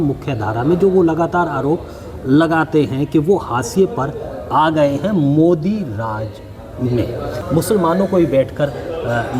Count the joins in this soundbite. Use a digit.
1